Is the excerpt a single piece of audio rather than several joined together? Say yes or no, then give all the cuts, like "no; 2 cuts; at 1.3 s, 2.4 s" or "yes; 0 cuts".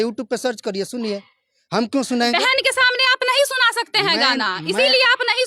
yes; 0 cuts